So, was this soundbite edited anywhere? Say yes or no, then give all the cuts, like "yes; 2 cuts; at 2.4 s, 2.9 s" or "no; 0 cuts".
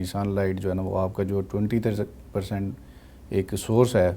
no; 0 cuts